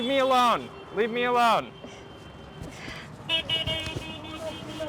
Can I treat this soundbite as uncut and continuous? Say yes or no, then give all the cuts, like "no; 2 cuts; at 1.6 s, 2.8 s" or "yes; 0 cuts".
yes; 0 cuts